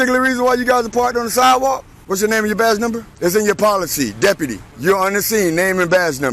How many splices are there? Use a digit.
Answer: 3